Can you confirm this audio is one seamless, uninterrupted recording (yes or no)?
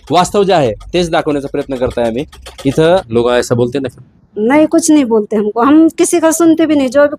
no